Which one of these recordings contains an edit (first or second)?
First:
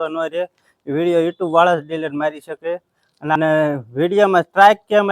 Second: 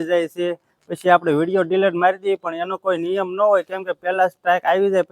first